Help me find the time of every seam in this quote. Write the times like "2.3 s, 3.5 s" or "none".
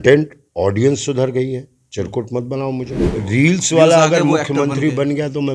3.1 s